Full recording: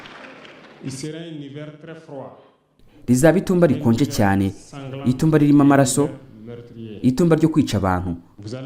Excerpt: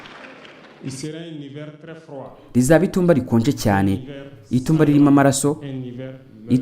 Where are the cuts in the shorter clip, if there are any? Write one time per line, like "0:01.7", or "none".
0:02.4